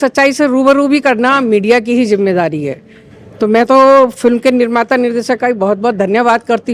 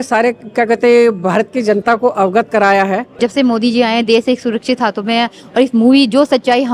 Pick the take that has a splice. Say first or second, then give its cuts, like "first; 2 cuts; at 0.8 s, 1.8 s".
second; 1 cut; at 3.2 s